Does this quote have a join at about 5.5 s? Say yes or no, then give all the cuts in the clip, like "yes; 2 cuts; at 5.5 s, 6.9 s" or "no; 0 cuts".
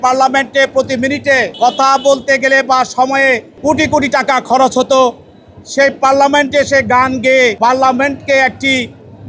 no; 3 cuts; at 1.5 s, 3.5 s, 7.6 s